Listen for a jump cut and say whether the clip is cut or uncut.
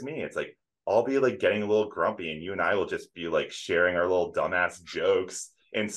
uncut